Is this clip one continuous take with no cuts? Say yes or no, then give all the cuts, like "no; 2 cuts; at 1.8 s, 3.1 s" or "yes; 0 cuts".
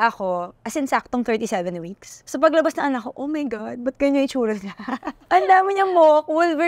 no; 1 cut; at 5.1 s